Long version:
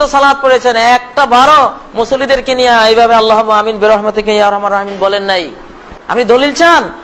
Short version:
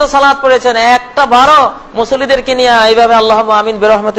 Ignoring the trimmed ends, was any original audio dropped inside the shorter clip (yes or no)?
no